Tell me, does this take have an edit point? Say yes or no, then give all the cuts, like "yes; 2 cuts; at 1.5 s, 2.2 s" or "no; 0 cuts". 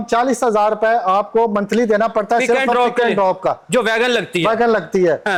no; 0 cuts